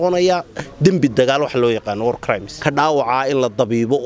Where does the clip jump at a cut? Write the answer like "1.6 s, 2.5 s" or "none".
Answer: 2.5 s